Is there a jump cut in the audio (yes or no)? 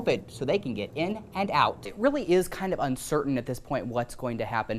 yes